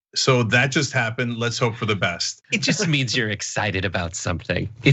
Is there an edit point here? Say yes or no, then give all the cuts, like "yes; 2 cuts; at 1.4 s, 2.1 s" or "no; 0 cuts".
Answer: yes; 1 cut; at 2.5 s